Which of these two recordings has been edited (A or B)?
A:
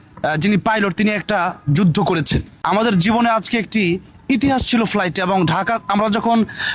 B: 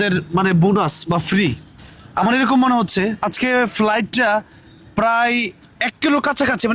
A